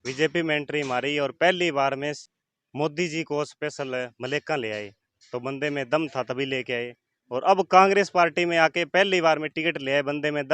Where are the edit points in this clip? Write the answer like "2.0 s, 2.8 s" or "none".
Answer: 2.2 s